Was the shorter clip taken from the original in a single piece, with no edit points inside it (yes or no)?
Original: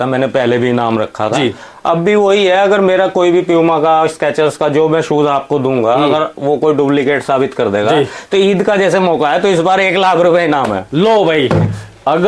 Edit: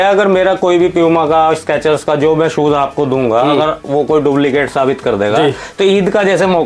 yes